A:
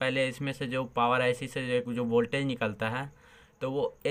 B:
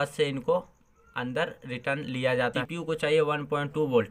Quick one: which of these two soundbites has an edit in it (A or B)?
B